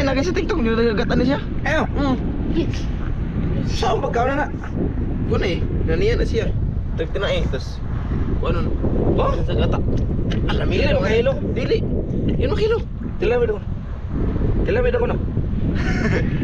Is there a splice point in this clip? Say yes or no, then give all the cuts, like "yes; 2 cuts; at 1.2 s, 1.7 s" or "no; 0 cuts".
no; 0 cuts